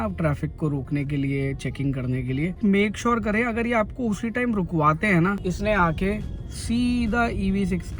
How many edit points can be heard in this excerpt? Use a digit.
2